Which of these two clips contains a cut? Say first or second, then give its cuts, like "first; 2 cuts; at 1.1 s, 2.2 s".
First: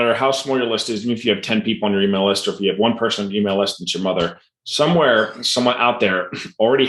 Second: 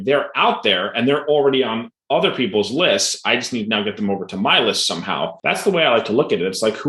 second; 1 cut; at 5.4 s